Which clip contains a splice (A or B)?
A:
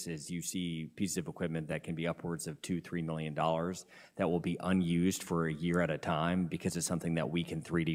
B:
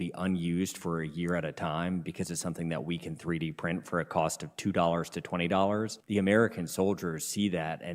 B